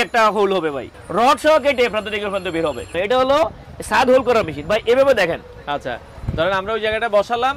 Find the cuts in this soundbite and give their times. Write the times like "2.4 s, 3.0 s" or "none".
0.9 s, 2.9 s